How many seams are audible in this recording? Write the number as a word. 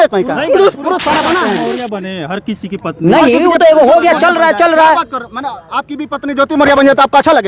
one